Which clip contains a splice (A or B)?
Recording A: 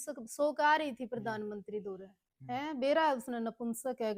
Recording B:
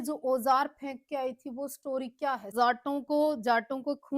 B